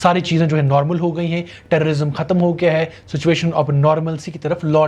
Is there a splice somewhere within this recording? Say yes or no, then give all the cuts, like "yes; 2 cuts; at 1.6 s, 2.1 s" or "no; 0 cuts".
no; 0 cuts